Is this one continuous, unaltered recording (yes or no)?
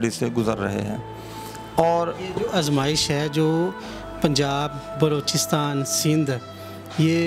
yes